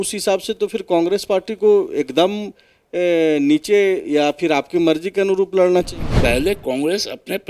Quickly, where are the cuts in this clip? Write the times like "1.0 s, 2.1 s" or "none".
6.0 s

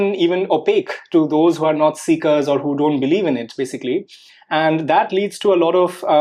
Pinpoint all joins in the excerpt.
none

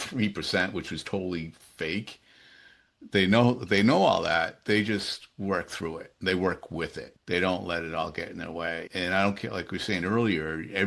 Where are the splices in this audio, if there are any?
7.0 s, 8.9 s

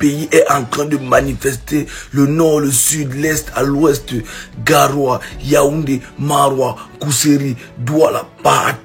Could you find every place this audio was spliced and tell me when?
none

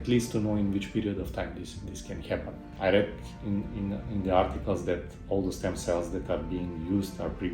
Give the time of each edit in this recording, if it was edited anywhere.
2.6 s

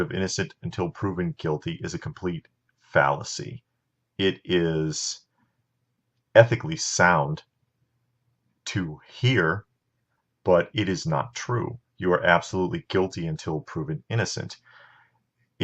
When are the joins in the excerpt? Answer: 4.7 s

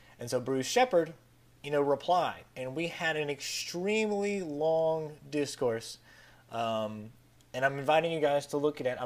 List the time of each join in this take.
none

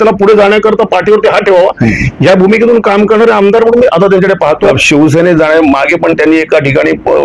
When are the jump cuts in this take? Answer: 4.8 s

